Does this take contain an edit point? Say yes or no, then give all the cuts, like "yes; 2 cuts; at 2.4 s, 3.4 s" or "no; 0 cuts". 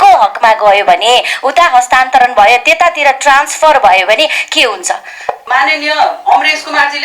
yes; 1 cut; at 5.4 s